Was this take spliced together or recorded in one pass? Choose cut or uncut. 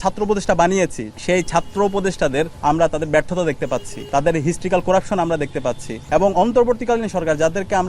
cut